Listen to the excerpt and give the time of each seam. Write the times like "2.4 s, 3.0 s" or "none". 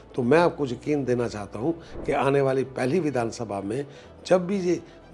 none